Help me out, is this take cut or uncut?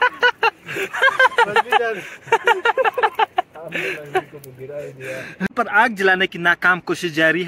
cut